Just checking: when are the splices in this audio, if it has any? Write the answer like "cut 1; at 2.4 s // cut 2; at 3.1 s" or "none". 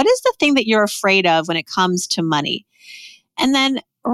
none